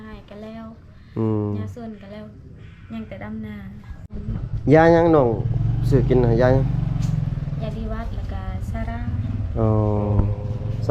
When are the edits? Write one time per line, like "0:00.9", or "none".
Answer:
0:04.1